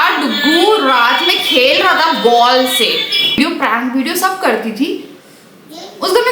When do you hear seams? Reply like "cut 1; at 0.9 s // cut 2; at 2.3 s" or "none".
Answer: cut 1; at 3.4 s

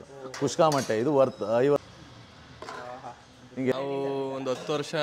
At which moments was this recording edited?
cut 1; at 1.8 s // cut 2; at 3.8 s

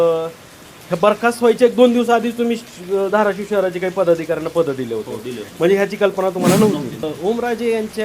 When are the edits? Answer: cut 1; at 7.0 s

